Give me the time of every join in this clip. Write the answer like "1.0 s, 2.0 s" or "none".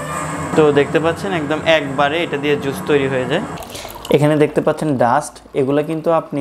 3.6 s